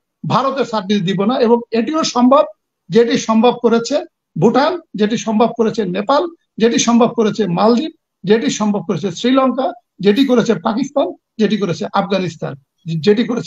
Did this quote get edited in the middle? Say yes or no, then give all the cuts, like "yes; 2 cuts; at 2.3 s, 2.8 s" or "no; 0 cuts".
no; 0 cuts